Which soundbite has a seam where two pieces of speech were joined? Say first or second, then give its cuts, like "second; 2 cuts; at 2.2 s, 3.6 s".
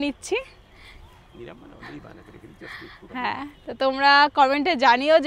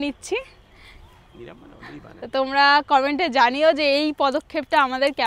second; 1 cut; at 2.1 s